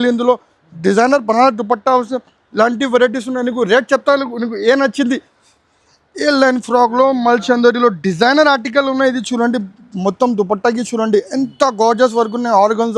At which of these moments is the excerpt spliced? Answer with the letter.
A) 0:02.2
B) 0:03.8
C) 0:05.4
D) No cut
C